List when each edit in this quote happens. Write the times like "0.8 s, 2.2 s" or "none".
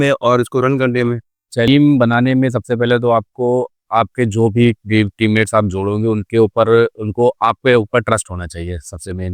1.7 s